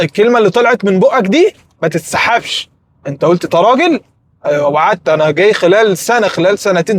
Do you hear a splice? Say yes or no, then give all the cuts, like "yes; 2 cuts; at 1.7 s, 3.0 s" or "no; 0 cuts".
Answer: no; 0 cuts